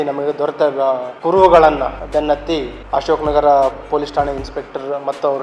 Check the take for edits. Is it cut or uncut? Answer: cut